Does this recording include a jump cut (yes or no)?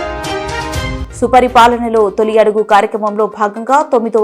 yes